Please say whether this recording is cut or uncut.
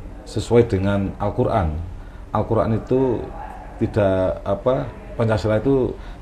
uncut